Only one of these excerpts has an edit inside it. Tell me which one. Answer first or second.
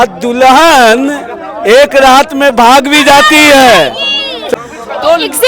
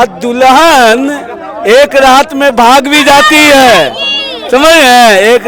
first